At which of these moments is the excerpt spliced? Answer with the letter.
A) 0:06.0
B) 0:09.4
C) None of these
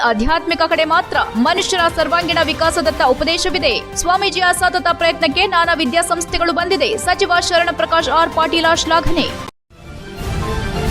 B